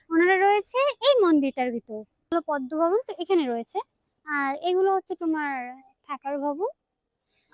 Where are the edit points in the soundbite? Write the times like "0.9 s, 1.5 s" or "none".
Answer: 2.3 s